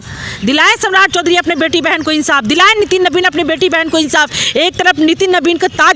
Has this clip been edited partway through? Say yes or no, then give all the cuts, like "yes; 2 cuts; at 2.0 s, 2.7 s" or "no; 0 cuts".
no; 0 cuts